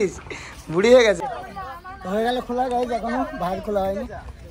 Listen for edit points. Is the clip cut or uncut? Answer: cut